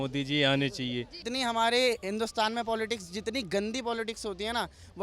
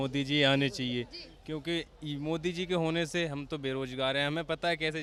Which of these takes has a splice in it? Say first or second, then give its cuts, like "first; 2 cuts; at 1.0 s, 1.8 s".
first; 1 cut; at 1.2 s